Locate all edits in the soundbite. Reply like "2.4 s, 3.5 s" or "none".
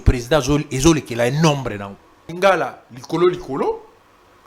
2.3 s